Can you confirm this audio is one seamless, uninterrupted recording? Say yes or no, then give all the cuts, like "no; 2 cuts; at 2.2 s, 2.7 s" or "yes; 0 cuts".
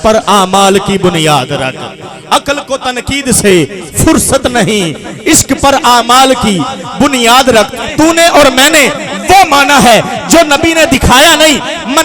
no; 1 cut; at 7.8 s